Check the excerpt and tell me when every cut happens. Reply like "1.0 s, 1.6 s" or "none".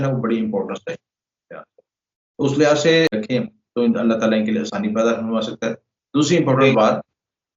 3.2 s